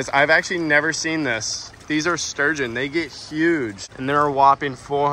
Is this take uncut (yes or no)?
yes